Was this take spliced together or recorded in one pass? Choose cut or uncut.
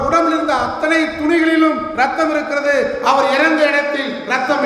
uncut